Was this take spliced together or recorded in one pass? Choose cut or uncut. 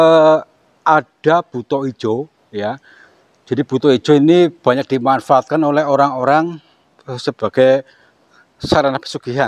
uncut